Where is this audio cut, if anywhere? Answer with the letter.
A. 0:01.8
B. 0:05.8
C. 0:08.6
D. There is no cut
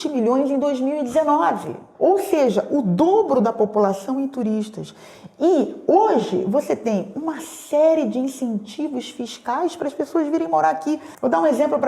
A